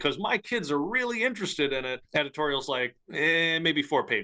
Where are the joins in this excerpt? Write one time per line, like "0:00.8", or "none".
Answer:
0:02.0